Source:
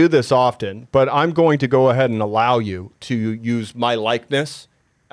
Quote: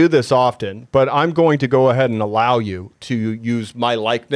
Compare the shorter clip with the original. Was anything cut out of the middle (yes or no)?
no